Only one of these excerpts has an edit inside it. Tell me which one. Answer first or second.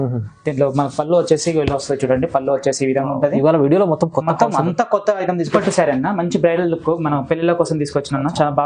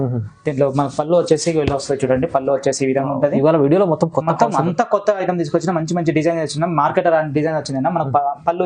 first